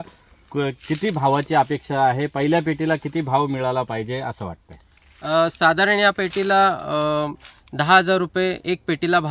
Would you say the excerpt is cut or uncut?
uncut